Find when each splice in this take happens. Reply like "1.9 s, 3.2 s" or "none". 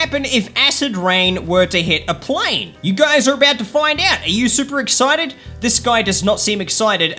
none